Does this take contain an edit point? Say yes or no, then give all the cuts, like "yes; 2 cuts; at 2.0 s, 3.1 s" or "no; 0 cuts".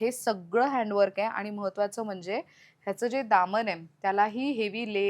no; 0 cuts